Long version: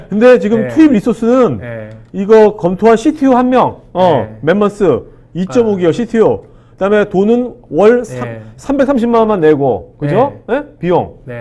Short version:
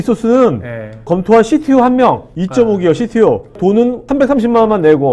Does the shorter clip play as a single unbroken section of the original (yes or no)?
no